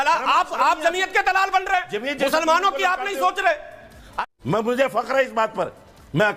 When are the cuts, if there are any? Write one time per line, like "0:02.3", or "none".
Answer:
0:04.2